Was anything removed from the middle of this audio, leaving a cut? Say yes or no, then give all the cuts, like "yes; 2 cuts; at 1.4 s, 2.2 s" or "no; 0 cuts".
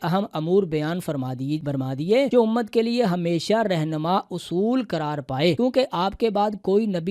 yes; 2 cuts; at 2.0 s, 5.6 s